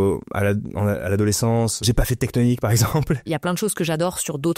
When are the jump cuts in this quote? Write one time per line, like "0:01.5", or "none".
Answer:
0:01.8
0:03.3